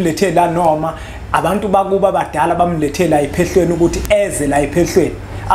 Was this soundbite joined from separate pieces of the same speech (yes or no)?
no